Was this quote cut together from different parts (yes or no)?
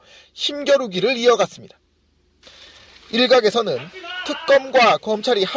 yes